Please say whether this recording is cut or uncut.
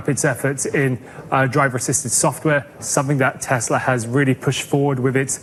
uncut